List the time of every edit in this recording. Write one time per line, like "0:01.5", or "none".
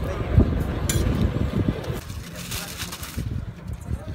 0:02.0